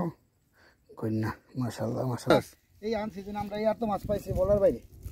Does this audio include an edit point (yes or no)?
yes